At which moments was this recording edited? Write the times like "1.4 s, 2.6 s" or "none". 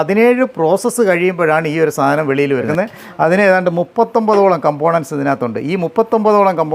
2.7 s